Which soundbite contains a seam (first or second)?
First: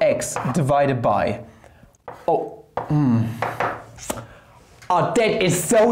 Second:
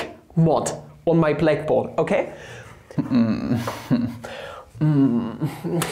second